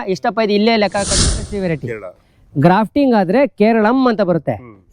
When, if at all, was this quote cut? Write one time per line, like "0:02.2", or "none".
0:01.4

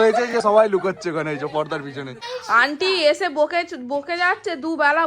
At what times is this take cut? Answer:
0:02.2

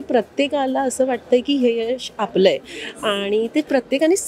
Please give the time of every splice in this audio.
none

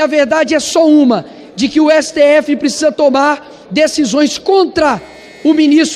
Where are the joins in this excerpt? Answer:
none

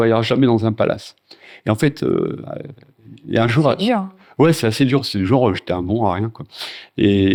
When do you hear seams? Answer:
none

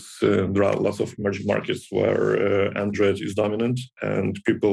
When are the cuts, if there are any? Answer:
none

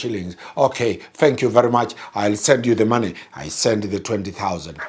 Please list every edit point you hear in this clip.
none

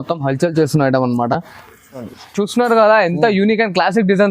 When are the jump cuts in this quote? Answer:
0:02.0

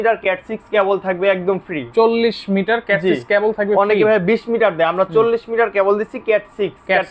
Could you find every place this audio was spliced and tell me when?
none

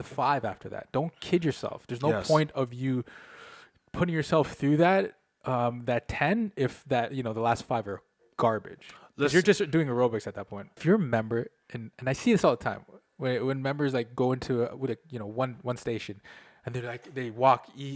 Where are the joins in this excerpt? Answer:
0:10.8

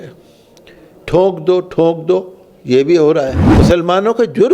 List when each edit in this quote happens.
0:03.4

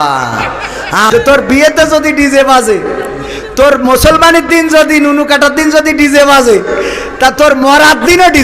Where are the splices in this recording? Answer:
0:01.1

